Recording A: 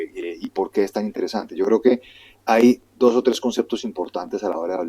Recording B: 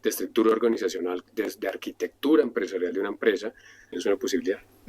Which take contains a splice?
B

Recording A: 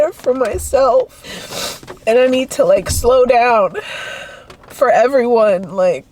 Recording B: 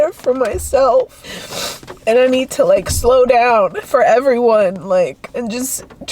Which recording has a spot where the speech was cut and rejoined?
B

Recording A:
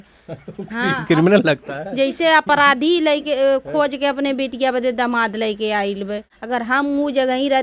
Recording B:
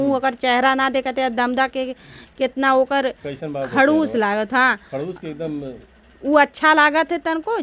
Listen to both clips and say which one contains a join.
A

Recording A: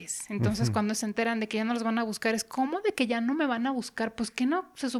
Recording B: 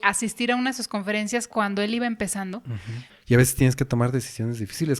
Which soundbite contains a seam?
B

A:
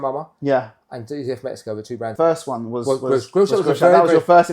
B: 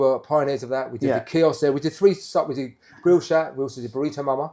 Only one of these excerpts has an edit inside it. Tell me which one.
A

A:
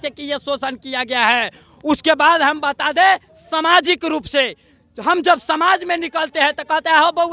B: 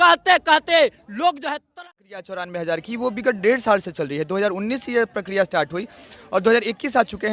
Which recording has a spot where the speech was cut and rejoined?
B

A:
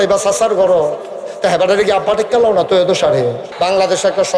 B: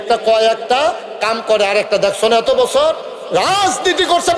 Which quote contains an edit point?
A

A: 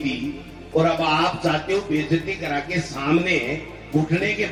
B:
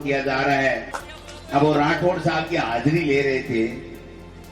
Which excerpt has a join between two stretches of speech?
B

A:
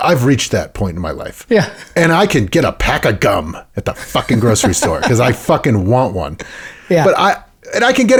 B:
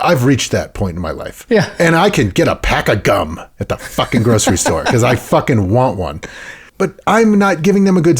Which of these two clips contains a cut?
B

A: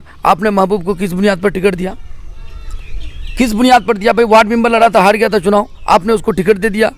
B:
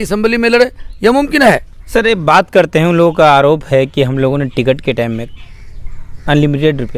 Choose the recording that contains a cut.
B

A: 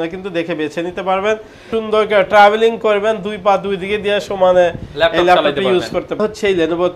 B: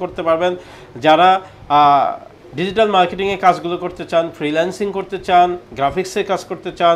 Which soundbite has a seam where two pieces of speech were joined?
A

